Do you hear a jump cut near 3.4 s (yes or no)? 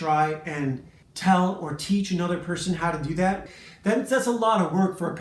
yes